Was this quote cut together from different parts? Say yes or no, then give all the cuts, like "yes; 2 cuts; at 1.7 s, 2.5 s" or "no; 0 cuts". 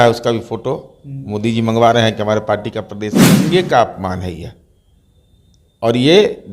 yes; 1 cut; at 3.2 s